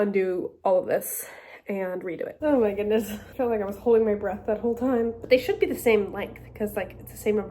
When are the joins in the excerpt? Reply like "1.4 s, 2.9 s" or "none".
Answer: 2.3 s, 5.2 s